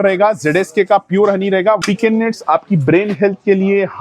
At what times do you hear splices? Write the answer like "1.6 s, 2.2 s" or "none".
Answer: 1.8 s